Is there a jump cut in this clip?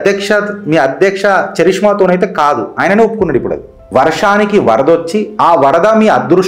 yes; 1 cut; at 3.7 s

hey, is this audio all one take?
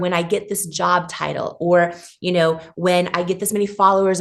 yes; 0 cuts

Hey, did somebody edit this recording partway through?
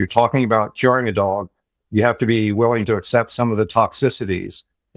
no; 0 cuts

